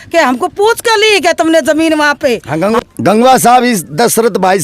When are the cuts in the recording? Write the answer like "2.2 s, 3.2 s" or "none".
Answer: 2.8 s